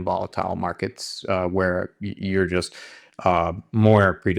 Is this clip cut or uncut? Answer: uncut